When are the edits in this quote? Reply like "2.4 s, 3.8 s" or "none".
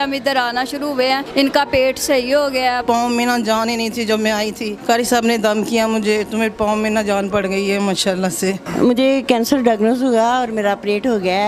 1.3 s, 2.8 s, 4.7 s, 8.6 s